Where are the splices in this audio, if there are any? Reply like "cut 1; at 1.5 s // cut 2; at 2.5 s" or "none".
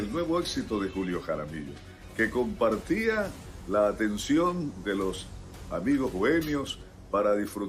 none

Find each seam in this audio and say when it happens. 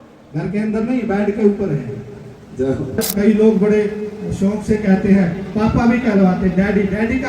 cut 1; at 3.0 s

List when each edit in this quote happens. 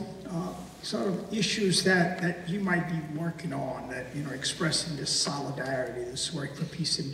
cut 1; at 1.0 s

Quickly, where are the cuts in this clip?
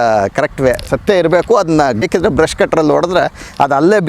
cut 1; at 0.8 s // cut 2; at 2.1 s

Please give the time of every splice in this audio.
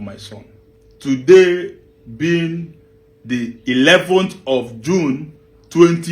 cut 1; at 1.2 s

